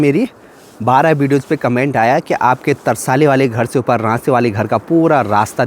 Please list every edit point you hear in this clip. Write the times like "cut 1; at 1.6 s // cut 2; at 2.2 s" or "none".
none